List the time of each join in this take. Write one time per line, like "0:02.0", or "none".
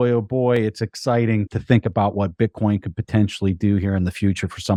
none